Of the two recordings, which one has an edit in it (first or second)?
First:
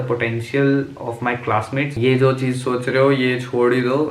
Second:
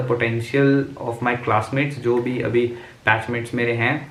first